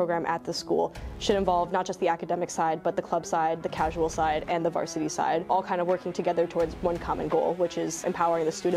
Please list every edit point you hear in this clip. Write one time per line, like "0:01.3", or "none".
0:05.5
0:08.0

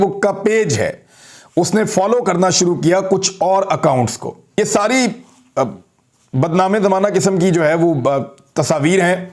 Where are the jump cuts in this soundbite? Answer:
0:04.6

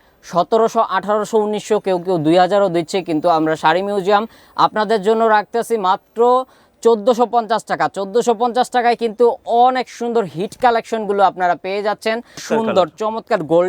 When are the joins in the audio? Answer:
0:12.4

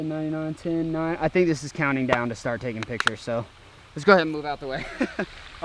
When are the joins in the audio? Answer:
none

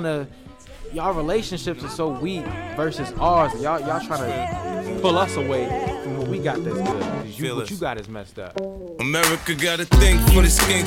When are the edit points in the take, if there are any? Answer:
0:08.5

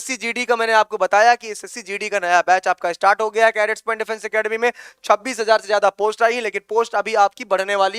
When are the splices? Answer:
none

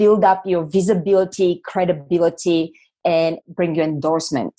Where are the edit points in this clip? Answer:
0:03.4

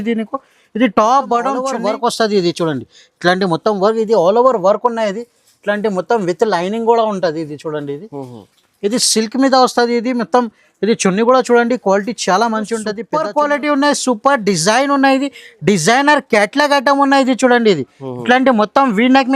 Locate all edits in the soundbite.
0:01.7
0:13.0

